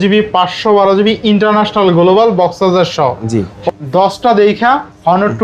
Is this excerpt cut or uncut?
cut